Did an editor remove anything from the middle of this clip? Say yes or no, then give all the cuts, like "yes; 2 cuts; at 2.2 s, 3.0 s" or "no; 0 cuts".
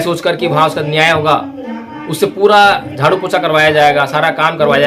no; 0 cuts